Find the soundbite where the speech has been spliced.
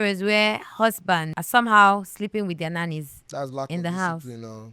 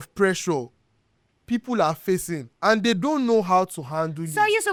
first; 1 cut; at 1.4 s

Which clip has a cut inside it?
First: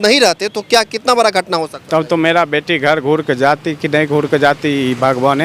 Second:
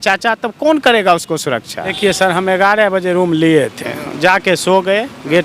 second; 1 cut; at 2.0 s

